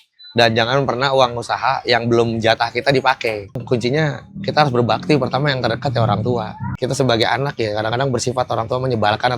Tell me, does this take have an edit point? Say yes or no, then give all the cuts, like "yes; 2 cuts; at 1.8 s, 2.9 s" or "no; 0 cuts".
yes; 2 cuts; at 3.6 s, 6.6 s